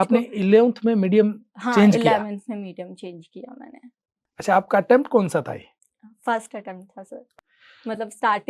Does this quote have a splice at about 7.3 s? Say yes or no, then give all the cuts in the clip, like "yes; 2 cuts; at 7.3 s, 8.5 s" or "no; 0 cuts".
yes; 2 cuts; at 4.2 s, 7.3 s